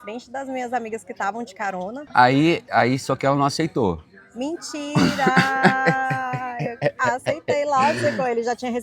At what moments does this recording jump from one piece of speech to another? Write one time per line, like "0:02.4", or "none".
0:02.0